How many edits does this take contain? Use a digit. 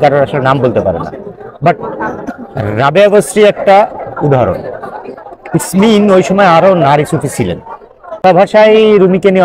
1